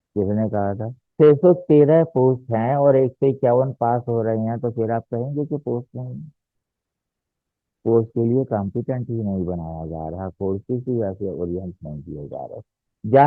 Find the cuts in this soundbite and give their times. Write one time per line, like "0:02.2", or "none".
0:01.0